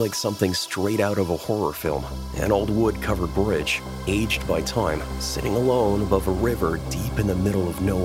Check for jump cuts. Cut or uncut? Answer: uncut